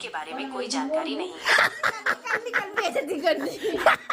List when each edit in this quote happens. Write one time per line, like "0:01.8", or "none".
none